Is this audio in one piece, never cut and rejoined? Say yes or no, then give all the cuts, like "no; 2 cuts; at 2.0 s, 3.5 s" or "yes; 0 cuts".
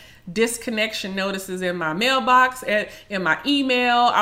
yes; 0 cuts